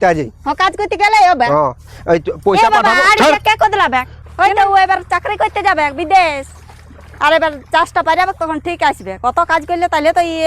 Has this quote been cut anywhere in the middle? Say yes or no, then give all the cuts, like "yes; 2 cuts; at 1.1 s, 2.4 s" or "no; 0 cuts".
yes; 1 cut; at 4.2 s